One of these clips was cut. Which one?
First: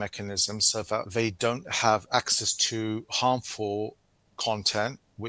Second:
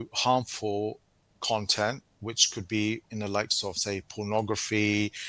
first; 1 cut; at 1.1 s

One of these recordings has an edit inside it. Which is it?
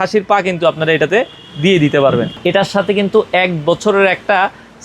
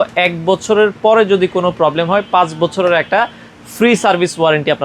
first; 1 cut; at 2.3 s

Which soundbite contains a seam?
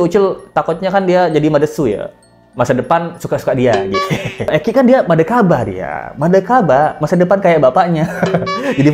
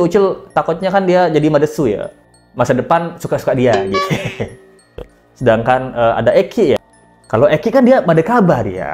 first; 1 cut; at 4.5 s

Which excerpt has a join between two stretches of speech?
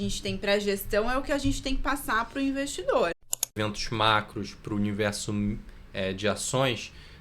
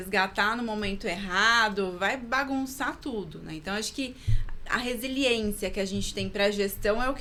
first; 1 cut; at 3.6 s

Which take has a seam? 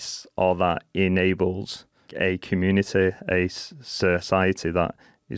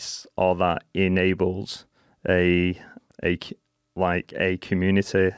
first; 1 cut; at 2.1 s

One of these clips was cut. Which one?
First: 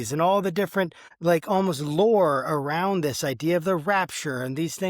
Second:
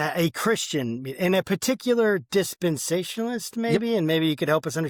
first; 1 cut; at 1.0 s

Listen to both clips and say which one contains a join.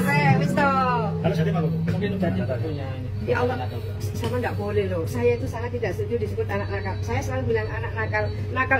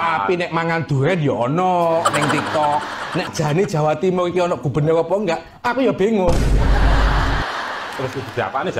second; 1 cut; at 3.3 s

